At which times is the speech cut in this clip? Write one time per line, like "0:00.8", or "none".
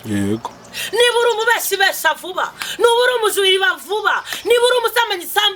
none

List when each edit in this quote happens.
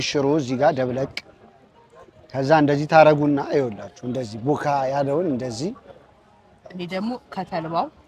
none

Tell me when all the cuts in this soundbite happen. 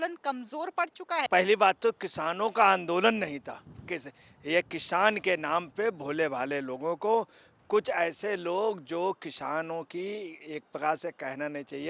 0:01.3
0:03.8

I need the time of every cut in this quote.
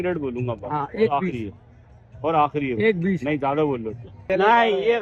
0:04.1

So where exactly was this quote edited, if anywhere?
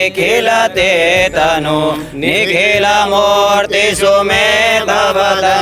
none

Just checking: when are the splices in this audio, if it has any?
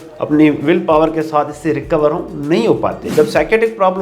0:03.0

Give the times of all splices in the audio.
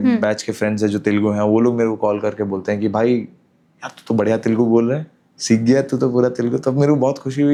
none

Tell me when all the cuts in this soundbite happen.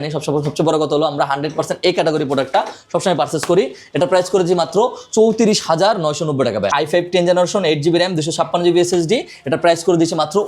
0:06.7

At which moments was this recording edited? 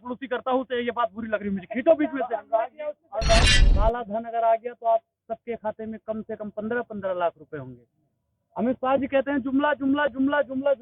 0:03.6

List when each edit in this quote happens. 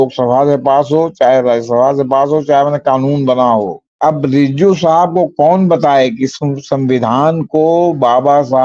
0:03.8

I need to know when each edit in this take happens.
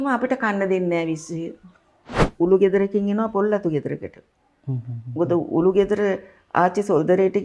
0:02.2

